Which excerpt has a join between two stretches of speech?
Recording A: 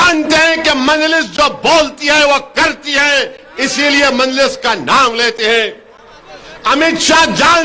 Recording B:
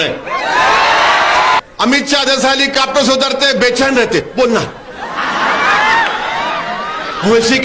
B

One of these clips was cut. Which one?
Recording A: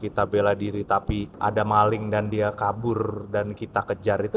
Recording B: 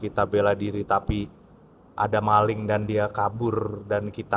A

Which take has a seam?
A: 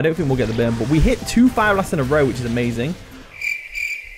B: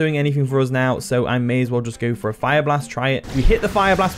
B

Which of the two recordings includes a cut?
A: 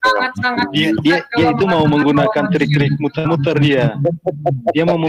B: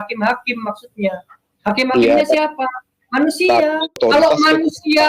B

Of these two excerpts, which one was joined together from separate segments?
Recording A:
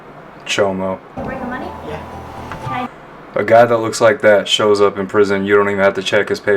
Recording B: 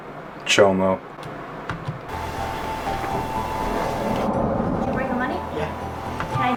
A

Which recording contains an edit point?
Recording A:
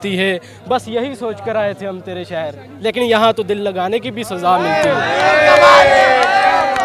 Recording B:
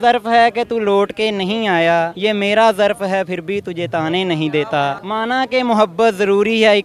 B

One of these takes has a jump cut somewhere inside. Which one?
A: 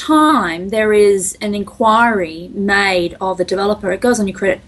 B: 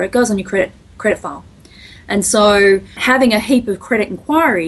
B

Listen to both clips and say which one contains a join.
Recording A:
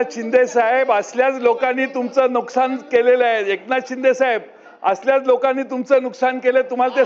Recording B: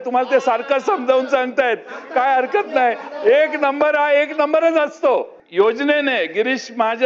B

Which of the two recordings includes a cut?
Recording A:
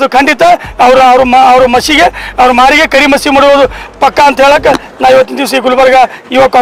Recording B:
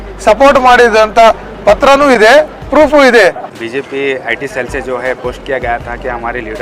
B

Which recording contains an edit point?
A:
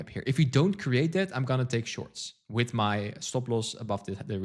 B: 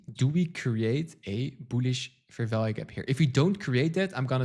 A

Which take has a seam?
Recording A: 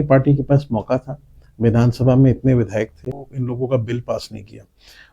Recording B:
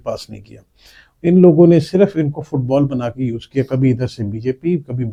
A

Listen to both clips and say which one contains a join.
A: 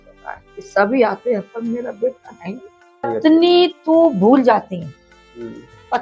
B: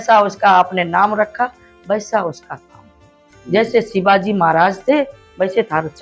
A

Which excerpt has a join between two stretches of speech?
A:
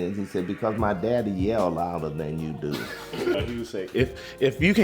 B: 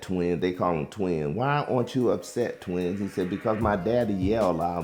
A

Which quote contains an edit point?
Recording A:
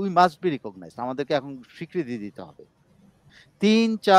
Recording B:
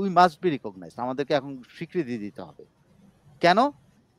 A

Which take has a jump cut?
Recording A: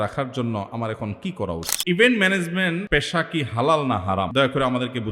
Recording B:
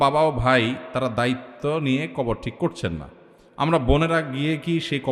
A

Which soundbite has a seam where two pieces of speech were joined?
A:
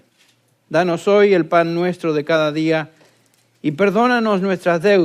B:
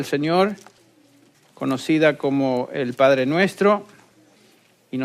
A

